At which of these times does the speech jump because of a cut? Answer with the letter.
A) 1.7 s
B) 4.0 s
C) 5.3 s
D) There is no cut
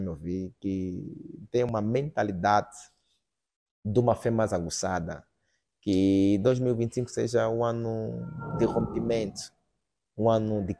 A